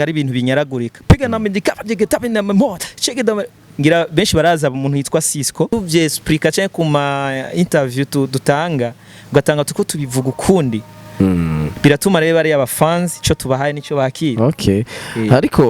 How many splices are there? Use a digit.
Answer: 1